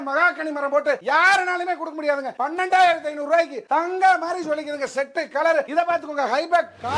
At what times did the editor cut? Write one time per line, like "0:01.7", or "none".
0:02.4
0:05.7